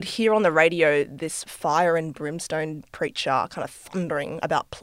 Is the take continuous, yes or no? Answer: yes